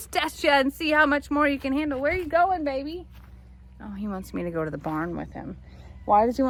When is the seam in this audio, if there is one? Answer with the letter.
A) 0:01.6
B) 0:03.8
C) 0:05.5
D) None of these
D